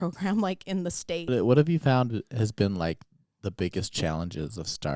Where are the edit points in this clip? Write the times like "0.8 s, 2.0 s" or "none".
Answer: 1.3 s